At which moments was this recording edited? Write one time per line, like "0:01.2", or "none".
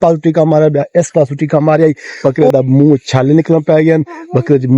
0:02.1

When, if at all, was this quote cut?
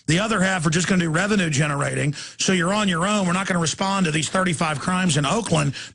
0:01.9

